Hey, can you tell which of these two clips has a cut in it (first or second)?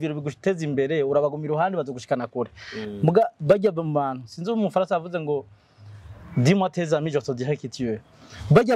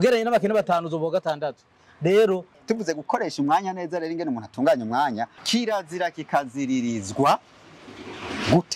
second